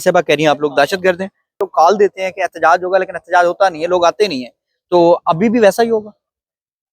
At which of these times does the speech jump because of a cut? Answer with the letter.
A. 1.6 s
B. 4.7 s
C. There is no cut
A